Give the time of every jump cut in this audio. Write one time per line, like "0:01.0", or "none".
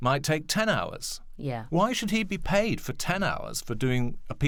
none